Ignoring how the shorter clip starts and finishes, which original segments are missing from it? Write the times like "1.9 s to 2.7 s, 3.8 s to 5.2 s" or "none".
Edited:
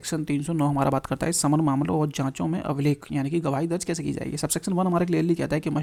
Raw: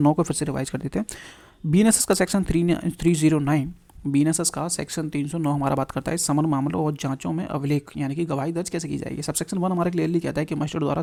none